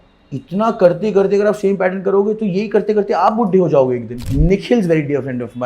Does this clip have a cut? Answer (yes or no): yes